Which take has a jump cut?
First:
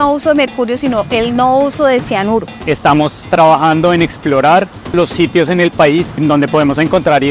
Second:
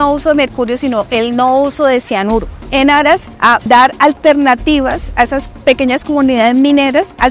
first; 3 cuts; at 2.6 s, 4.9 s, 6.2 s

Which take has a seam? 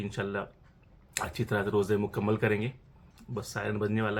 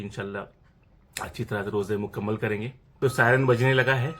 second; 1 cut; at 2.8 s

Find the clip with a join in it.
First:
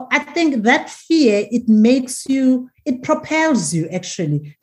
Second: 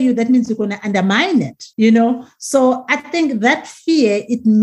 second; 1 cut; at 1.6 s

